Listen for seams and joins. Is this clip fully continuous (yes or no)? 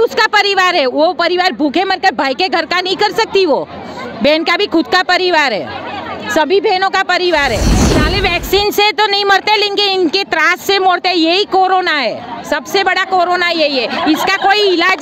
no